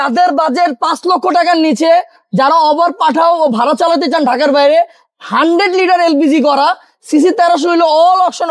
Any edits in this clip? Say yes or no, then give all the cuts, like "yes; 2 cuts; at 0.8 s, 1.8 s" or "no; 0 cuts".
no; 0 cuts